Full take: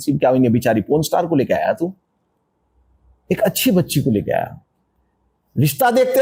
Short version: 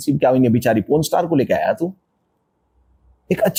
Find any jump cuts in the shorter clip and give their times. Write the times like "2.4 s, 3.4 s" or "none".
none